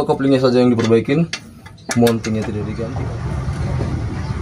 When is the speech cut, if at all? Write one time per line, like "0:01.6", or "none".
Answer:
0:02.7